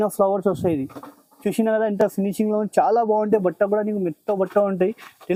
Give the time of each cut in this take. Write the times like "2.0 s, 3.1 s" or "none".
none